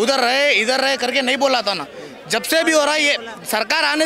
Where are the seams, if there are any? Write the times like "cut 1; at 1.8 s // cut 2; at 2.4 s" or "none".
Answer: none